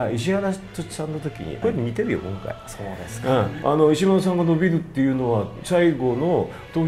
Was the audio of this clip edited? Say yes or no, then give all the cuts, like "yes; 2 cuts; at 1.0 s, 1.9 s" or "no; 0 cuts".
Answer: yes; 2 cuts; at 1.6 s, 3.5 s